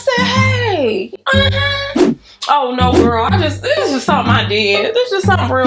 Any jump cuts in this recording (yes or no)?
no